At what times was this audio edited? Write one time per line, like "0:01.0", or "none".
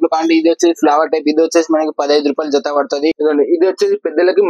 0:03.2